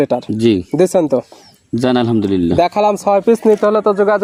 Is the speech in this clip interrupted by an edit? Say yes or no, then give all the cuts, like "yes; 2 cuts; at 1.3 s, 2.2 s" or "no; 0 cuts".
no; 0 cuts